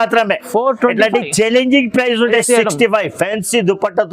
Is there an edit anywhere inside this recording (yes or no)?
yes